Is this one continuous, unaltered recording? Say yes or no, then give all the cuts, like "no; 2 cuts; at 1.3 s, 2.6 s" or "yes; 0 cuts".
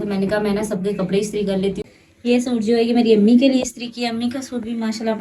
no; 1 cut; at 1.8 s